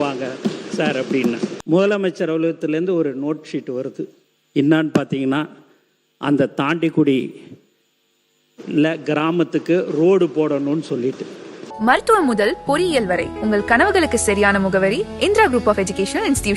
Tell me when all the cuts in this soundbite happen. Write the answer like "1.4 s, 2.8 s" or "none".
1.5 s, 11.6 s